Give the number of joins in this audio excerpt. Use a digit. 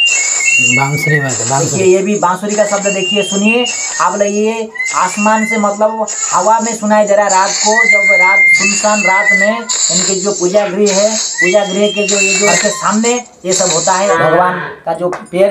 2